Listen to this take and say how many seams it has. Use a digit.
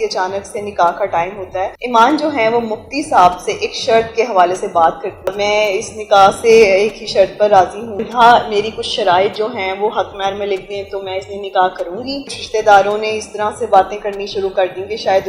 4